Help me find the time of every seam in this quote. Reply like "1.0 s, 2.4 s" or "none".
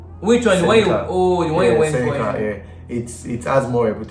none